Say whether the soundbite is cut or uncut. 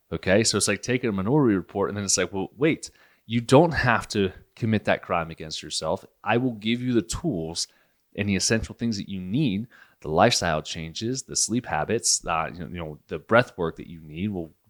uncut